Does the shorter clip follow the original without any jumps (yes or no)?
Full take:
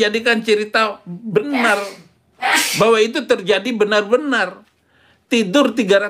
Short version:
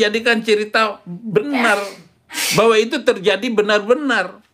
no